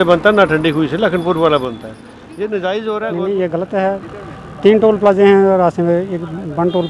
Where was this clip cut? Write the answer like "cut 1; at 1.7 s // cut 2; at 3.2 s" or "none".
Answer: cut 1; at 3.1 s